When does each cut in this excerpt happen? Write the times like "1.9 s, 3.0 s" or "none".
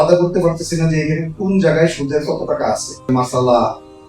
3.1 s